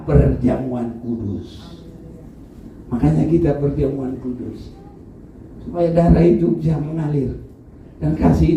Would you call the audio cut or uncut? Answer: cut